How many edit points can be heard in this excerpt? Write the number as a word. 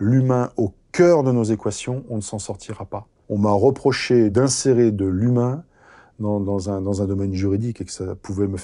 two